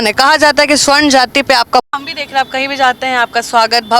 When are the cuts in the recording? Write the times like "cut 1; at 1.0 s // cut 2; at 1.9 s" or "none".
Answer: cut 1; at 1.9 s